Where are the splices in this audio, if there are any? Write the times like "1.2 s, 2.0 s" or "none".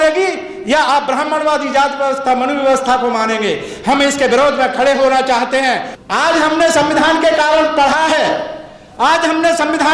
5.9 s